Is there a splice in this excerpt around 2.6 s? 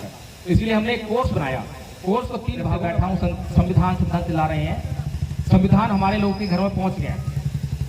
yes; 1 cut; at 2.6 s

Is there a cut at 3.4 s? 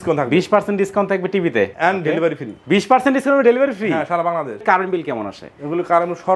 no; 2 cuts; at 1.7 s, 4.6 s

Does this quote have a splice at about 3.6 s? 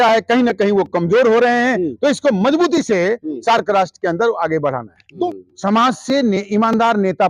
no; 1 cut; at 5.3 s

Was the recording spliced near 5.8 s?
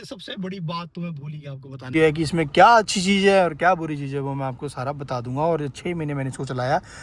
no; 1 cut; at 1.9 s

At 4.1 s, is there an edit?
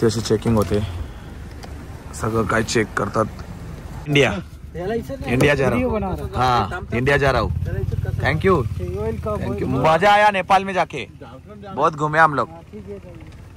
yes; 1 cut; at 4.1 s

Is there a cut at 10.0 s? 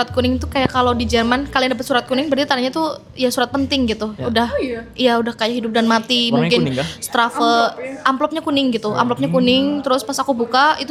no; 0 cuts

